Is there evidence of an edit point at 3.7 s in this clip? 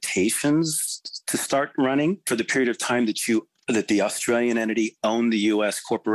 no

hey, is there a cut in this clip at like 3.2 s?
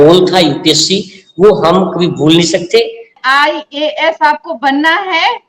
yes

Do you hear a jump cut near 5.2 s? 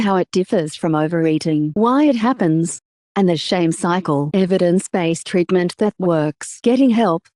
no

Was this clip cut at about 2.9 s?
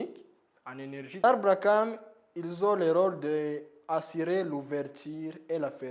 no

